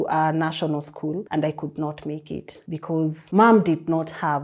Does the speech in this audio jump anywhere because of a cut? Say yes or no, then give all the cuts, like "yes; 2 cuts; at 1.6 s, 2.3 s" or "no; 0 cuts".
yes; 2 cuts; at 1.3 s, 2.8 s